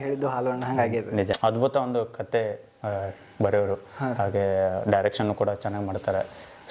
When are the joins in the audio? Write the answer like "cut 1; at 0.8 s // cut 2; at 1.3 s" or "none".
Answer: cut 1; at 1.4 s